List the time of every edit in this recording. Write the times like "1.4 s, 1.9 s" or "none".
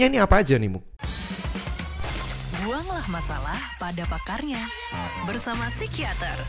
0.9 s

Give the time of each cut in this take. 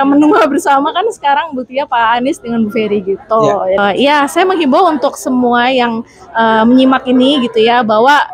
3.8 s

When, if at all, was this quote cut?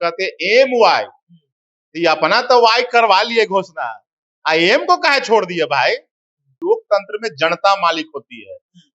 6.6 s

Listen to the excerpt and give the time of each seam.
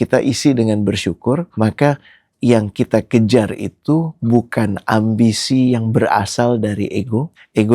1.5 s

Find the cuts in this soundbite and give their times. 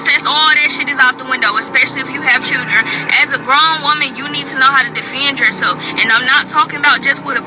none

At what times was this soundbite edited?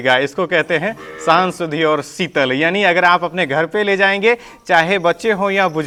none

